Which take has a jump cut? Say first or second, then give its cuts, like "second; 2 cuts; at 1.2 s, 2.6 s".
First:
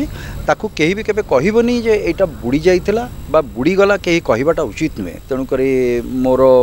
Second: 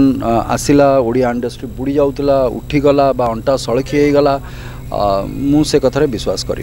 first; 1 cut; at 5.1 s